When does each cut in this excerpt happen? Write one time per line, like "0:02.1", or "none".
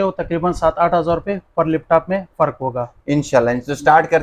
none